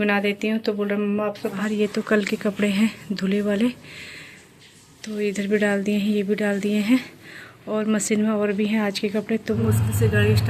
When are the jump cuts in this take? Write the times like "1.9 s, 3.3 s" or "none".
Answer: 1.6 s, 9.6 s